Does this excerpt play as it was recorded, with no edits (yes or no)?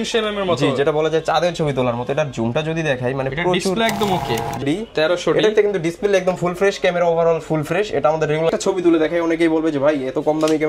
no